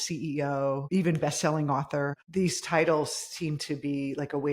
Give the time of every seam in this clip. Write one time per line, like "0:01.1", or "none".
0:00.8
0:02.2